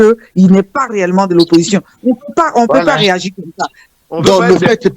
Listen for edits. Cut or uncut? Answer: cut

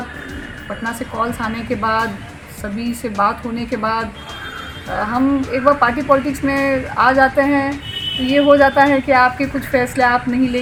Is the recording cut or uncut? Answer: uncut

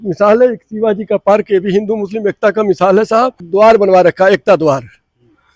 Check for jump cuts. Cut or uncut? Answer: cut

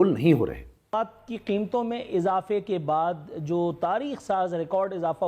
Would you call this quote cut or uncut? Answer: cut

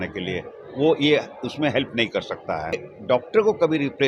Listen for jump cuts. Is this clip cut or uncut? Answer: cut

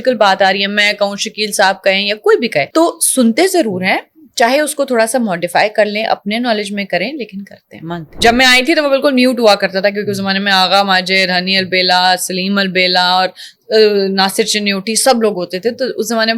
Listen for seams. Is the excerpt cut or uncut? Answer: cut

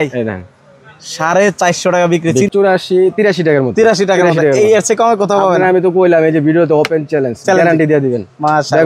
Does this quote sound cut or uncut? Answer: cut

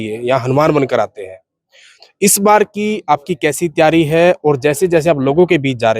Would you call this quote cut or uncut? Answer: uncut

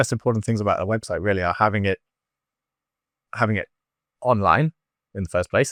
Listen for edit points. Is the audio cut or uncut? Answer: uncut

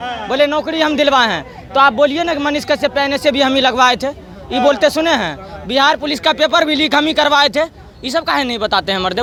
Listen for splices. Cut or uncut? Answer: uncut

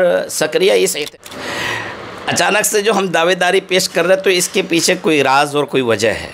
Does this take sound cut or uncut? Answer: cut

